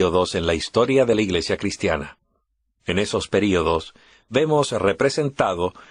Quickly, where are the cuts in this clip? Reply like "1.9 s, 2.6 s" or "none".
1.3 s